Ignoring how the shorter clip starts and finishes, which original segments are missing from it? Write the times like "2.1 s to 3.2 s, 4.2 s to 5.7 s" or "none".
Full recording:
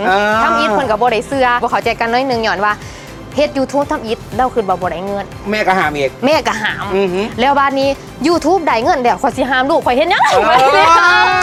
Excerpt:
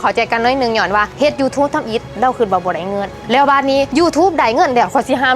2.8 s to 3.3 s, 5.4 s to 7.3 s, 8.0 s to 8.2 s